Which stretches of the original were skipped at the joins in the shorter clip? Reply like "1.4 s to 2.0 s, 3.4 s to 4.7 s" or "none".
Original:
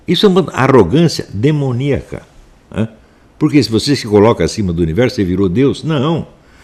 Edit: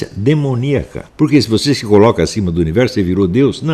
2.2 s to 3.2 s